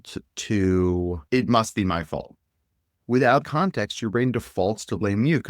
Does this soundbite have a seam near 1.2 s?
yes; 1 cut; at 1.2 s

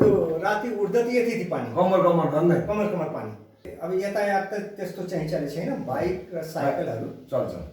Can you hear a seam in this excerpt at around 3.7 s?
yes; 1 cut; at 3.7 s

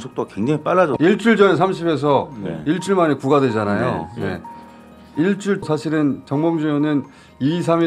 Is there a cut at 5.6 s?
yes; 2 cuts; at 0.9 s, 5.6 s

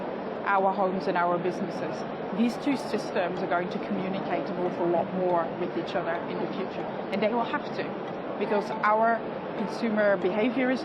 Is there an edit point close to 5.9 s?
no; 1 cut; at 8.1 s

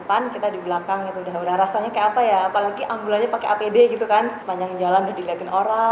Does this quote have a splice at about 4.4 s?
yes; 1 cut; at 4.4 s

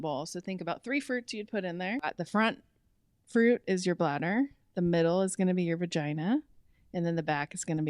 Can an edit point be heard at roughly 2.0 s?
yes; 1 cut; at 2.0 s

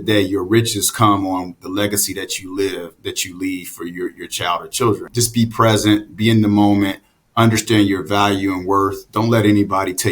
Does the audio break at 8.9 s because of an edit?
no; 1 cut; at 5.1 s

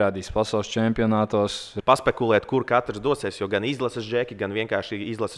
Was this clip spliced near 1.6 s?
yes; 1 cut; at 1.6 s

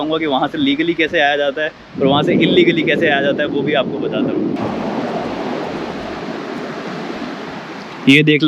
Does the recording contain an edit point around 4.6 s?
no; 0 cuts

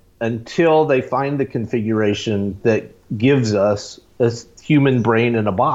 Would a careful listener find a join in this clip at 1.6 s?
no; 1 cut; at 4.5 s

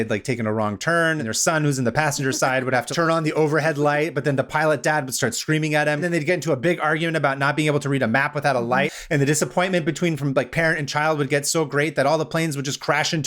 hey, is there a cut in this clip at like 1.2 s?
yes; 4 cuts; at 1.2 s, 2.9 s, 6.0 s, 8.9 s

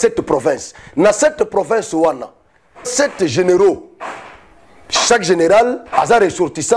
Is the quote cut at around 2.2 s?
no; 0 cuts

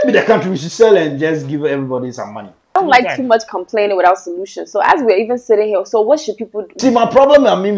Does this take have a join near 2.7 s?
yes; 2 cuts; at 2.7 s, 6.7 s

